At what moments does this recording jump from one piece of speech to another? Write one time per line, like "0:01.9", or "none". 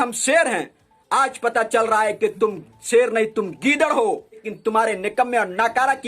0:04.5